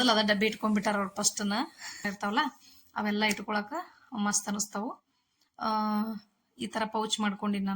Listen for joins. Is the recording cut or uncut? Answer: cut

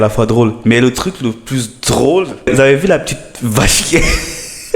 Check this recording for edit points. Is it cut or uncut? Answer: cut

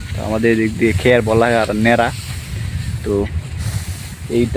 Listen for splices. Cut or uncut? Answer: uncut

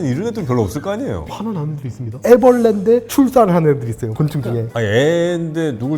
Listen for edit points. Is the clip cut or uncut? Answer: cut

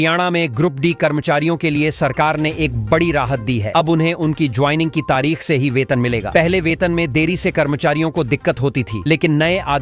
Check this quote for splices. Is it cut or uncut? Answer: uncut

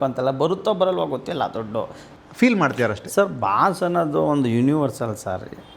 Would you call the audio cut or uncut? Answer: cut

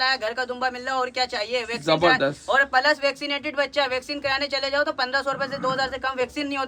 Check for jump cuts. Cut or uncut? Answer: uncut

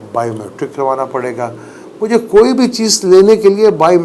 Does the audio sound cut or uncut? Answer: uncut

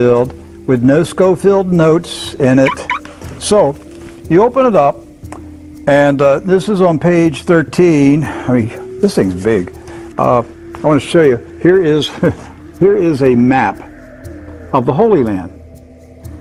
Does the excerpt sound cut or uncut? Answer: uncut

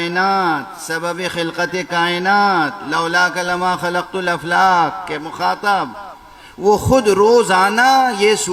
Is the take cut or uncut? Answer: uncut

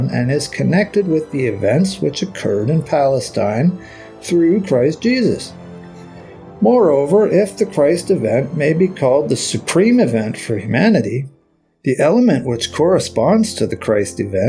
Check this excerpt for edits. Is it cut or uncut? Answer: uncut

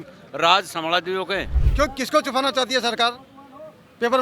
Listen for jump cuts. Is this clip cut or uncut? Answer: cut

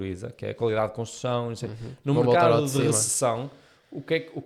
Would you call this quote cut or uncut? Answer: uncut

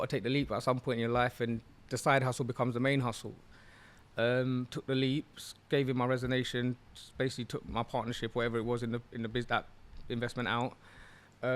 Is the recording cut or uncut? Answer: uncut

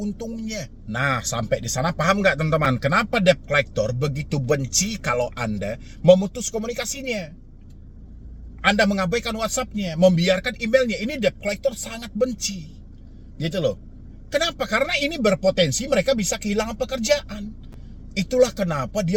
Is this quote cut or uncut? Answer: uncut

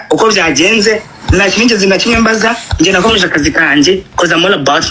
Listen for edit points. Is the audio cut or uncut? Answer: uncut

